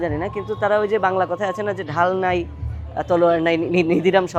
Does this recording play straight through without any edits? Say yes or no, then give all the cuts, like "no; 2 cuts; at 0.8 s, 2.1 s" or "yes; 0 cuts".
yes; 0 cuts